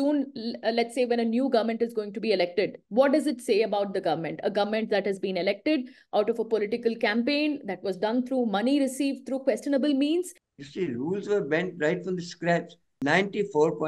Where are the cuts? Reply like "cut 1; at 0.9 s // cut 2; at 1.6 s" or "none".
cut 1; at 10.4 s // cut 2; at 12.8 s